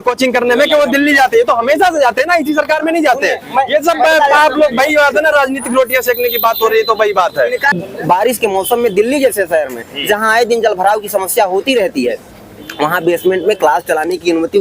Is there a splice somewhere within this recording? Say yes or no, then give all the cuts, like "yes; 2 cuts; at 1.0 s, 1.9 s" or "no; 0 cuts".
yes; 1 cut; at 7.8 s